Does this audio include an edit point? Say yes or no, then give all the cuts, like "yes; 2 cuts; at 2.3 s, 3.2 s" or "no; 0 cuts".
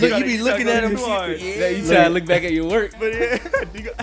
yes; 1 cut; at 3.0 s